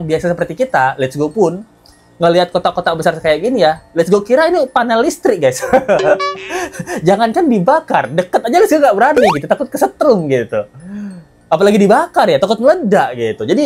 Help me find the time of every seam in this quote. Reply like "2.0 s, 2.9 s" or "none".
none